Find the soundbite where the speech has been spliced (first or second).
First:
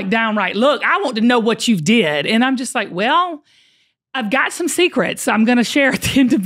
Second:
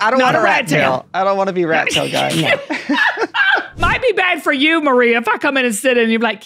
second